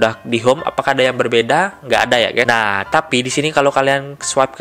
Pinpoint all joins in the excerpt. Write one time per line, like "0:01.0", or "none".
0:02.5